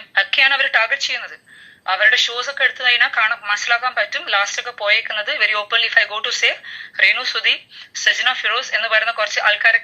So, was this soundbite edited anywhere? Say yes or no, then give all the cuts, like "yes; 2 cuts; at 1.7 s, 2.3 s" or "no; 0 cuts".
no; 0 cuts